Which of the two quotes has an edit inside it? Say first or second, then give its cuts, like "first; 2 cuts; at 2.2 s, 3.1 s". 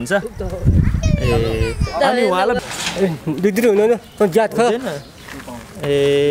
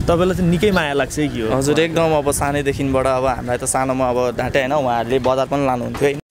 first; 1 cut; at 2.6 s